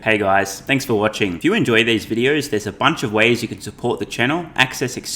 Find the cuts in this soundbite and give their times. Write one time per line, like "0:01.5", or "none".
0:00.9